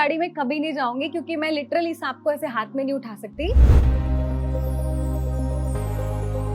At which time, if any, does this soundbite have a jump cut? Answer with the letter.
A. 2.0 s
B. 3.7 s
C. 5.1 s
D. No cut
B